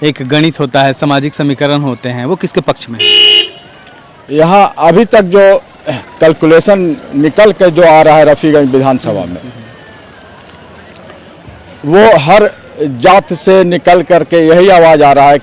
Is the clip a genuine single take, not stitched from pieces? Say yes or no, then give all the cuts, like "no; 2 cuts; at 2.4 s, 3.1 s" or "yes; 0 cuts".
yes; 0 cuts